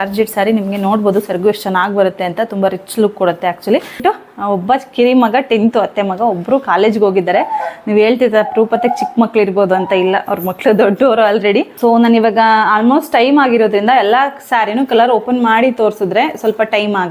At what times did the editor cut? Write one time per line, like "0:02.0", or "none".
0:04.0
0:11.7